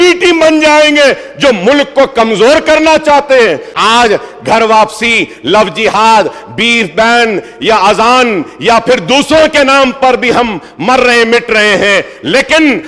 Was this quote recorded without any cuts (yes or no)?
no